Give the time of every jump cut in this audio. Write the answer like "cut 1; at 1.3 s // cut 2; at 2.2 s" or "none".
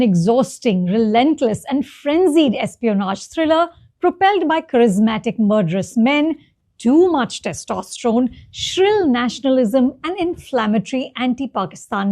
none